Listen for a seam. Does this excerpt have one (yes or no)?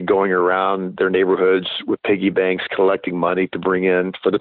no